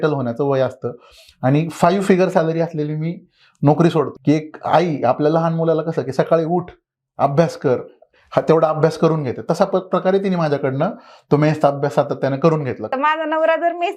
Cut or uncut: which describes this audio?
cut